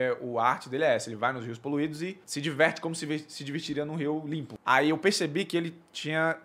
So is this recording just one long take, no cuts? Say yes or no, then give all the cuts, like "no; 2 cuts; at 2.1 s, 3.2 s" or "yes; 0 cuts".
no; 2 cuts; at 2.2 s, 4.5 s